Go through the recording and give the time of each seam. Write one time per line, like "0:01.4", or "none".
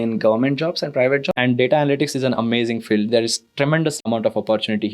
0:01.3
0:04.0